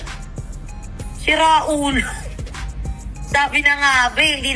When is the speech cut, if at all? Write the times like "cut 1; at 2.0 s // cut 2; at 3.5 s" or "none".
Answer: none